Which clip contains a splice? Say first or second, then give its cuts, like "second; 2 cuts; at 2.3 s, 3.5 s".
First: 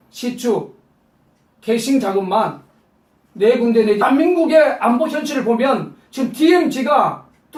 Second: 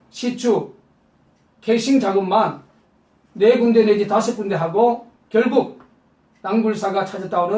second; 1 cut; at 4.0 s